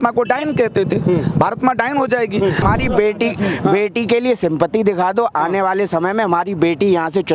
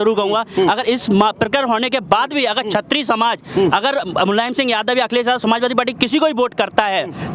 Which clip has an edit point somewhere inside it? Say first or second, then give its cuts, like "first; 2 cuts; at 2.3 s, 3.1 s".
first; 1 cut; at 2.6 s